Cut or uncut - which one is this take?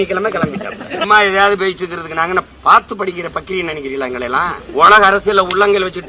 cut